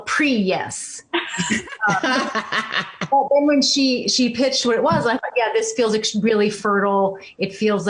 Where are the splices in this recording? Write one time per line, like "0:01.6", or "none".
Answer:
none

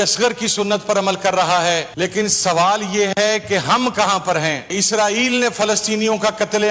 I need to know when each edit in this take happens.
0:01.9
0:04.7

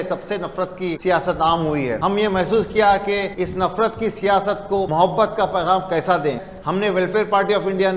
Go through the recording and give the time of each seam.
0:01.0
0:02.0
0:03.3
0:04.9
0:06.5

